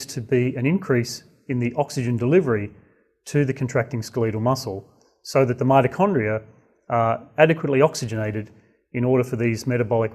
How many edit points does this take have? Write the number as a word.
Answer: one